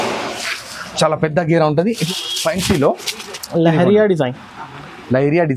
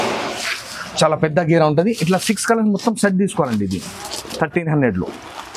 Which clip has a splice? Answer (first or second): first